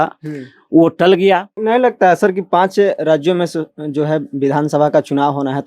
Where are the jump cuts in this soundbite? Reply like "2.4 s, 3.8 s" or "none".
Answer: 1.5 s